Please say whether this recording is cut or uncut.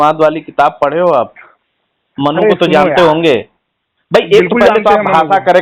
uncut